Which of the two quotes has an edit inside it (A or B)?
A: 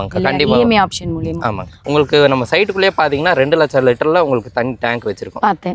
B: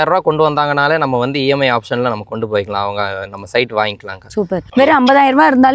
A